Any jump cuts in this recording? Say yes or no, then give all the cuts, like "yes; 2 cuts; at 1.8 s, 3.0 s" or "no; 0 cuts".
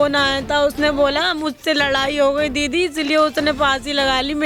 no; 0 cuts